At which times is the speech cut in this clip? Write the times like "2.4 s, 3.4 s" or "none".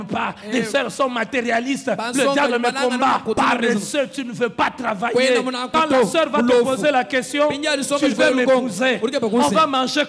3.4 s, 5.7 s